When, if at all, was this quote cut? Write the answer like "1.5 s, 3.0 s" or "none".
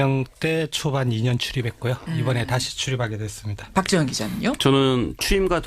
2.7 s